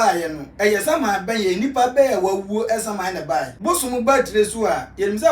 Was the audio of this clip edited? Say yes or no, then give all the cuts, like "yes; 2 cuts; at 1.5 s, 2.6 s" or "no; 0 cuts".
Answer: yes; 1 cut; at 3.5 s